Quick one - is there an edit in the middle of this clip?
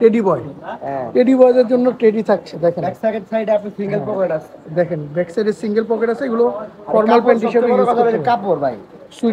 no; 0 cuts

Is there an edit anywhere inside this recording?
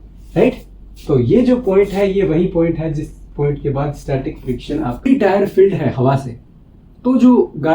yes; 1 cut; at 5.1 s

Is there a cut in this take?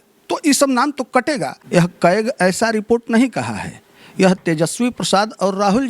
yes; 1 cut; at 1.5 s

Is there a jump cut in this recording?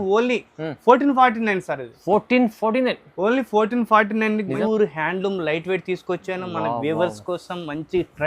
yes; 1 cut; at 4.5 s

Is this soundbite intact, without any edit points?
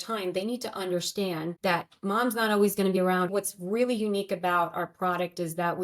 no; 2 cuts; at 1.6 s, 3.1 s

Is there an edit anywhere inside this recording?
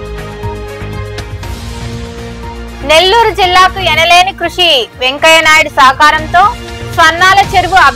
yes; 1 cut; at 1.2 s

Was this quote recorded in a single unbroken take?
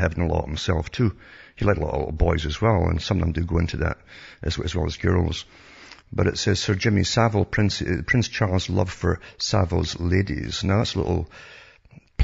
no; 1 cut; at 1.5 s

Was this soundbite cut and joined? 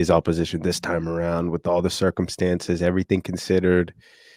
no; 0 cuts

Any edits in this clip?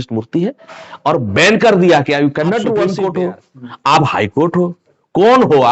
yes; 1 cut; at 2.9 s

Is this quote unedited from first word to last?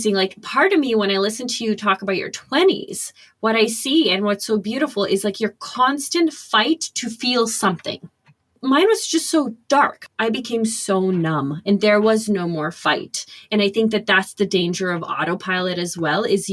no; 2 cuts; at 8.8 s, 10.0 s

